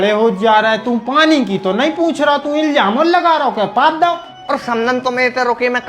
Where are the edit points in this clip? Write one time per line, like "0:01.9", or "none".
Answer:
0:04.3